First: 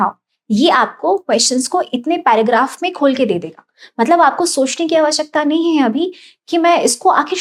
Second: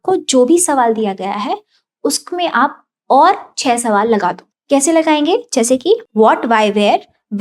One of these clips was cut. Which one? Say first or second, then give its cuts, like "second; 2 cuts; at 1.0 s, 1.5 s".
second; 2 cuts; at 4.5 s, 6.1 s